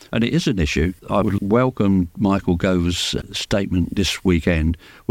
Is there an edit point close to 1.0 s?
yes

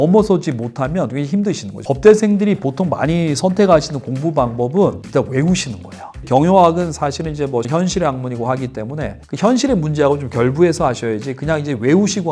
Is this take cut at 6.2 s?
yes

